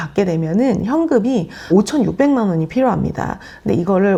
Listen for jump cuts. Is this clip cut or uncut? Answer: uncut